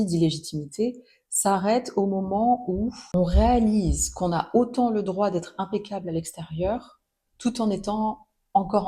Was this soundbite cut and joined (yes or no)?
no